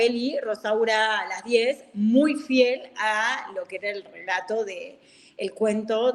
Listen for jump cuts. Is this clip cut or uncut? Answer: uncut